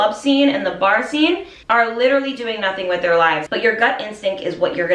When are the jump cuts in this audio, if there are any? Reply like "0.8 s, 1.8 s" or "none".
1.5 s, 3.4 s